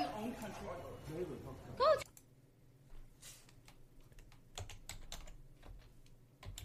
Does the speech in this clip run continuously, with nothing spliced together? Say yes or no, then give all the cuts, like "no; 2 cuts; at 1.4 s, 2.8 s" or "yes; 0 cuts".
yes; 0 cuts